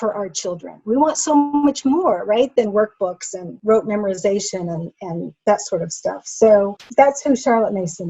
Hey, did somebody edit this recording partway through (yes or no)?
yes